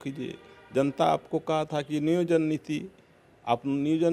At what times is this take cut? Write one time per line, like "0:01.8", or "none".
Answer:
none

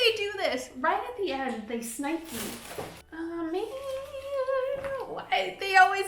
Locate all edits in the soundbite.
0:03.0

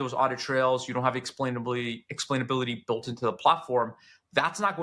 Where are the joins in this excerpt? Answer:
none

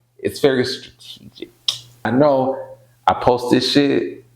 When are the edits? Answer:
0:02.1

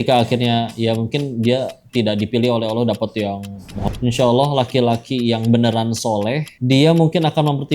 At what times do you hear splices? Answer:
0:03.9

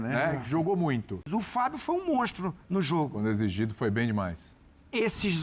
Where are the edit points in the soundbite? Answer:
0:01.3

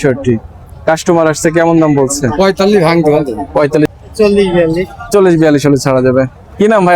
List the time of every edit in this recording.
0:03.9

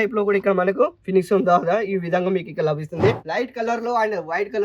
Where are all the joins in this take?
0:03.2

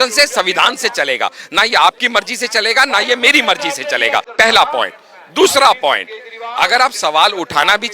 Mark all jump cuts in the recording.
0:04.3

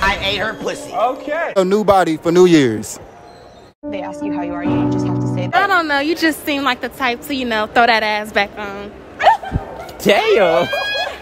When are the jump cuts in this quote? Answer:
0:01.6
0:05.5

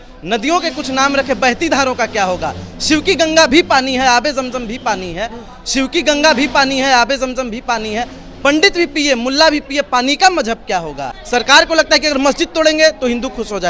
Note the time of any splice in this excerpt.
0:11.1

